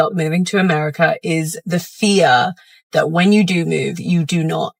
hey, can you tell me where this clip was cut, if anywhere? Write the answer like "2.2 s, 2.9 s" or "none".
none